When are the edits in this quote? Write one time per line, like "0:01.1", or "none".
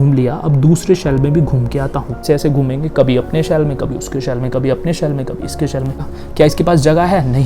0:02.2
0:06.1